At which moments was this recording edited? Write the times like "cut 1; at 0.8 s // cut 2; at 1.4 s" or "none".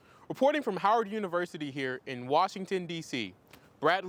none